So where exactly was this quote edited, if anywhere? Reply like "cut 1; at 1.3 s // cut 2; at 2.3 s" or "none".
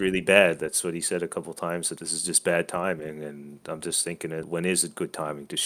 cut 1; at 1.9 s // cut 2; at 4.5 s

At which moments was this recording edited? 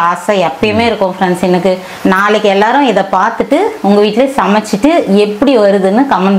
cut 1; at 1.9 s

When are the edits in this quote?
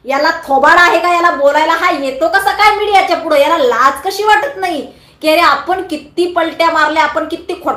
none

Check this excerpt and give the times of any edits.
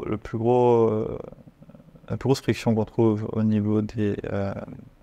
none

